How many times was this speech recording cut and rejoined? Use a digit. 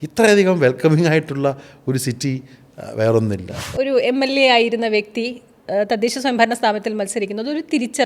1